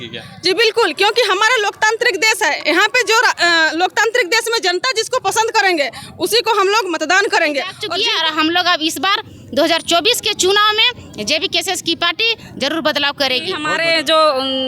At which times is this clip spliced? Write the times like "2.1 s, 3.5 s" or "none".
7.8 s, 13.7 s